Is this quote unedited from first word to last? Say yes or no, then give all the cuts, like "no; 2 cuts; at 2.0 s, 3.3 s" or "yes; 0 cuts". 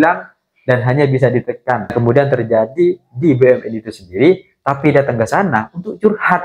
no; 1 cut; at 1.9 s